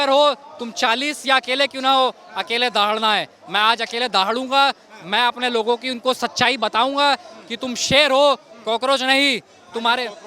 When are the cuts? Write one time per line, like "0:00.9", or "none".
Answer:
none